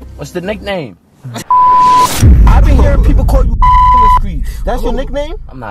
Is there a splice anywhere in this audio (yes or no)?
no